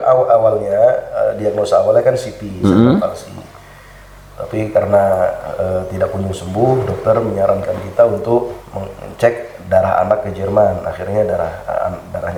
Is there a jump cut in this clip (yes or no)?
no